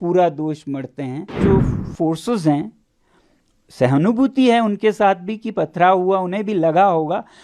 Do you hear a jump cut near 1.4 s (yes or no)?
yes